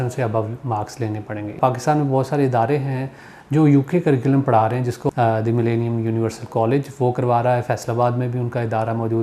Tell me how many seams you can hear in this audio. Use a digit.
2